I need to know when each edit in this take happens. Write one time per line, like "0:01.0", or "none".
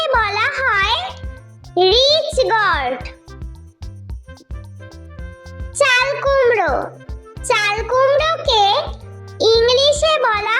0:03.0
0:05.2

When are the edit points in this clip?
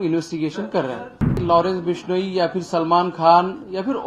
0:01.3

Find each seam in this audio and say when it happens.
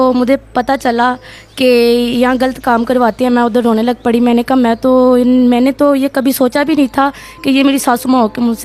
none

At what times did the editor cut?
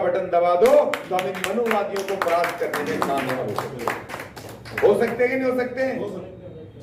none

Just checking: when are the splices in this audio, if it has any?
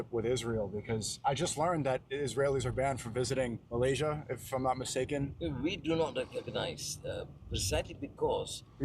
0:03.6
0:05.3

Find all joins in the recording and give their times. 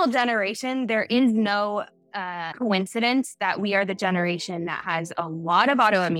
none

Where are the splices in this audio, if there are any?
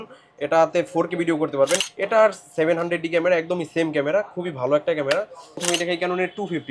0:01.9
0:05.5

